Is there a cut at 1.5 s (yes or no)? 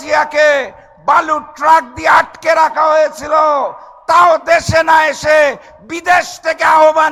no